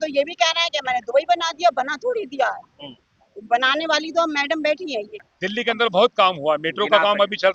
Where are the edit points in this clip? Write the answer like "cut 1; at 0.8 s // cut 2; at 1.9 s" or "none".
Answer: cut 1; at 5.2 s